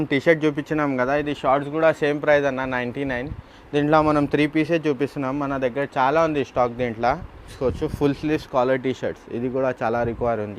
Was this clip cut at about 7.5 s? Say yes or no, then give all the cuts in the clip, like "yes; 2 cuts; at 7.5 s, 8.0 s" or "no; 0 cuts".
yes; 1 cut; at 7.5 s